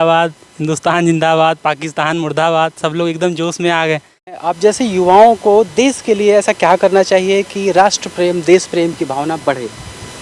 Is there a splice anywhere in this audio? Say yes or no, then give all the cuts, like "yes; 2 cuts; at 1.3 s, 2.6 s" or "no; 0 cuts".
yes; 1 cut; at 4.5 s